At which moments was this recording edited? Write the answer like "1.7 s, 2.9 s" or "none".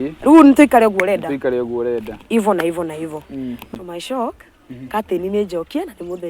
3.6 s